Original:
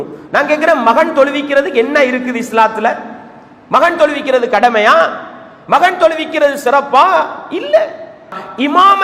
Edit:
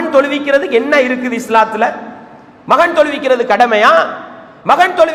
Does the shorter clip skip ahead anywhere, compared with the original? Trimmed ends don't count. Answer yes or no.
no